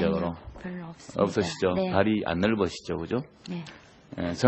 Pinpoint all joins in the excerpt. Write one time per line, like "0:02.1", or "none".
none